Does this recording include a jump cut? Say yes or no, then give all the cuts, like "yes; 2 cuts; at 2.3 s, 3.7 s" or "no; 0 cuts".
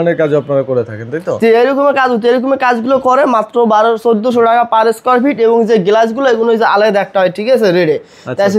no; 0 cuts